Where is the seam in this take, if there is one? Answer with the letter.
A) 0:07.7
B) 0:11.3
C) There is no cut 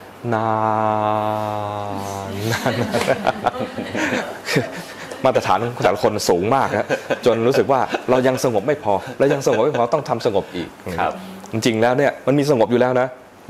C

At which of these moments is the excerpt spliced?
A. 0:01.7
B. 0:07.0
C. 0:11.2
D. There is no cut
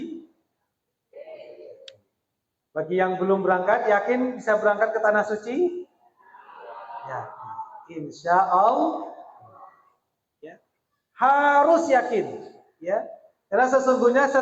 C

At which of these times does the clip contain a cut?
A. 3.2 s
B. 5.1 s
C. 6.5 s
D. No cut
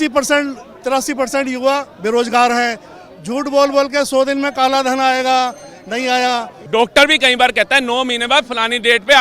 C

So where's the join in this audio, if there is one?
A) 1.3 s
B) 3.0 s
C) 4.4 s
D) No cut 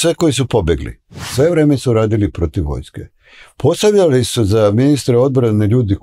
A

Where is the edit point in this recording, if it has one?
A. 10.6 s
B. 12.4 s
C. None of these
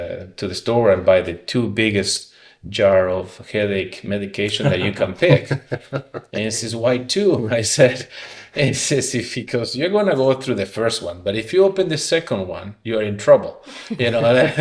C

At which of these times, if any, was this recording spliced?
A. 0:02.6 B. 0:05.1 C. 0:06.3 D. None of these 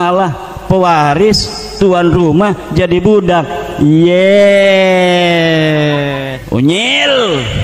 C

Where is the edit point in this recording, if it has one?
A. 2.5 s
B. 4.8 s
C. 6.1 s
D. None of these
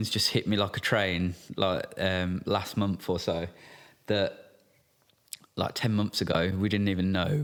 D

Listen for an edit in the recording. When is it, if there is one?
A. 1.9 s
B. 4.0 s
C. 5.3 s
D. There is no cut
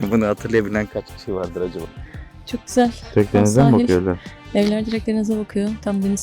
A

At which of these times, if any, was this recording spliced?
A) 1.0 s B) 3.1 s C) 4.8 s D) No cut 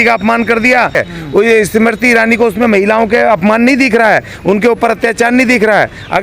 A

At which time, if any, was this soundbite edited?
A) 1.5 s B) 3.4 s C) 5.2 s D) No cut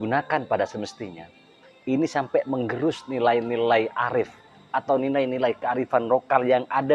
D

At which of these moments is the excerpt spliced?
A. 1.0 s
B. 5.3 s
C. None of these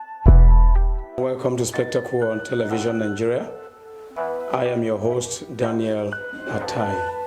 A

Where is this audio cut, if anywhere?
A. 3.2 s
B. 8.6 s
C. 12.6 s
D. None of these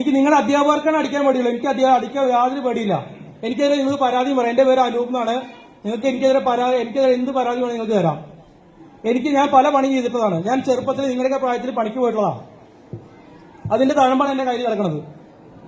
D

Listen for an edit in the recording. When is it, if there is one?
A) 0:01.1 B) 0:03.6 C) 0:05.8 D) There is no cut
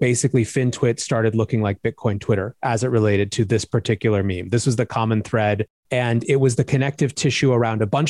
C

